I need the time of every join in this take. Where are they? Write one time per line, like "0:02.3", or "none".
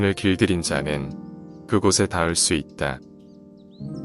0:03.0